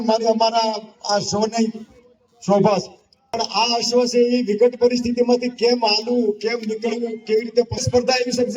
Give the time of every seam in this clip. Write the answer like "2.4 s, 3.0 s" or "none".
3.4 s, 7.8 s

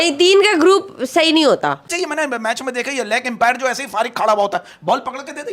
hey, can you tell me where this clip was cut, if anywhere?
1.9 s

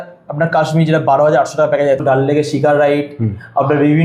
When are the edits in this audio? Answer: 2.0 s

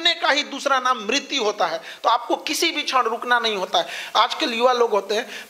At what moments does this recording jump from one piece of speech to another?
none

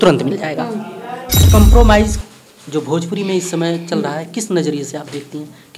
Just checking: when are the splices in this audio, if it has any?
1.4 s

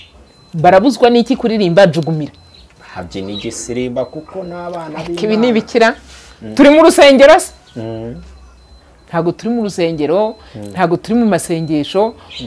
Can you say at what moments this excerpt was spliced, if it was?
none

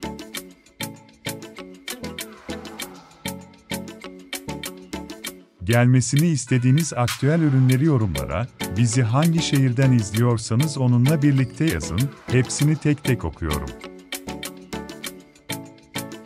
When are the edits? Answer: 5.6 s, 13.6 s

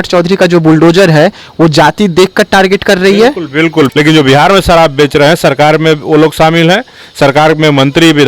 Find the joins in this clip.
3.9 s

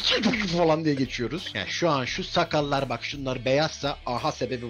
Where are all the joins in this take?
1.4 s

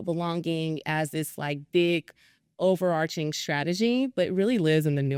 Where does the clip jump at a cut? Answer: none

